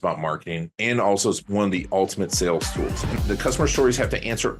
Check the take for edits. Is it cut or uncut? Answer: cut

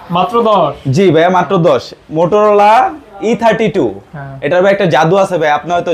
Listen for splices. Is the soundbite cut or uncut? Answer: uncut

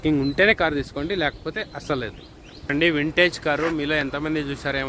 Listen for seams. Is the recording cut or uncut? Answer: cut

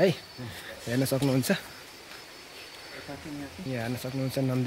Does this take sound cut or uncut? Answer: cut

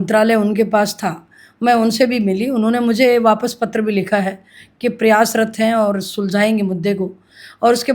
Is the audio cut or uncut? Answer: uncut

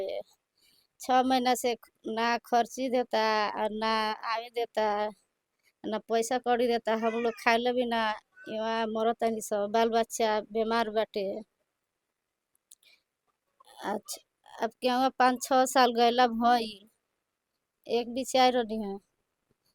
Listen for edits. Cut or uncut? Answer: uncut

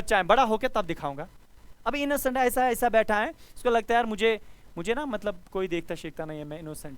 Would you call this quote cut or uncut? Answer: uncut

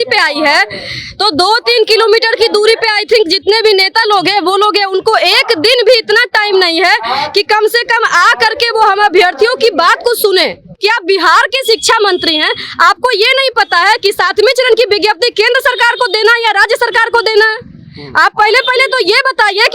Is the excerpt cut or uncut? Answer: cut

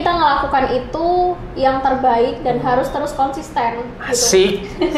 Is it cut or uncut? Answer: uncut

